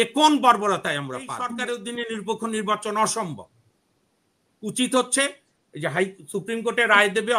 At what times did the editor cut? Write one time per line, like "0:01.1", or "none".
0:01.5